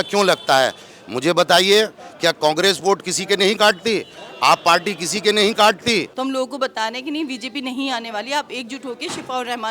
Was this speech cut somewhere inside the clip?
yes; 1 cut; at 6.1 s

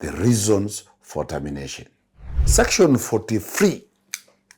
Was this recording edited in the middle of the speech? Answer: yes; 1 cut; at 2.4 s

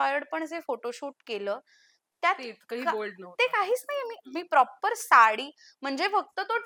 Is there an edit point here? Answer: no; 0 cuts

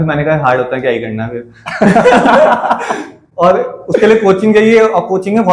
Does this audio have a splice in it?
no; 0 cuts

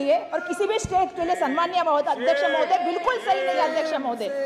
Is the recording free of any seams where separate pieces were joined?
yes; 0 cuts

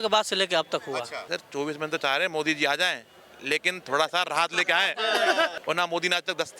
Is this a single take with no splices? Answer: no; 2 cuts; at 1.2 s, 5.6 s

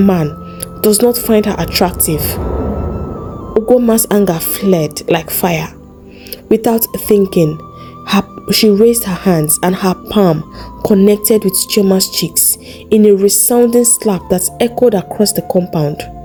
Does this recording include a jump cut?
no; 0 cuts

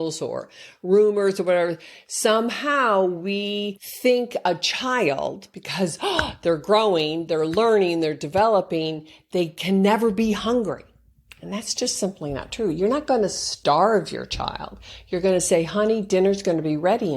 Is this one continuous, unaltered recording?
no; 1 cut; at 3.8 s

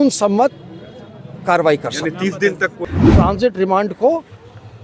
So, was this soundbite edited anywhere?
yes; 1 cut; at 2.8 s

